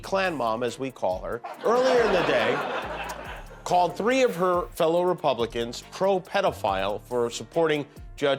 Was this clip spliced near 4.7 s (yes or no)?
no